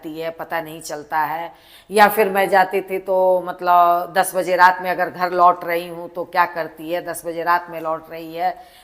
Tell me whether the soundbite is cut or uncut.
uncut